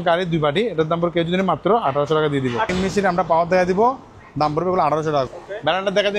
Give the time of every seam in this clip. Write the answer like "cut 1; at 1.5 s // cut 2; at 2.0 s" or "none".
cut 1; at 2.7 s // cut 2; at 5.3 s